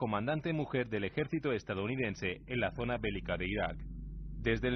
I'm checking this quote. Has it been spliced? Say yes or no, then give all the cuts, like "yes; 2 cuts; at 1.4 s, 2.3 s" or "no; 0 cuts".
no; 0 cuts